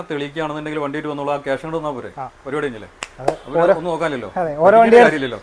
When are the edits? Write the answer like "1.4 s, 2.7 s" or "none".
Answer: none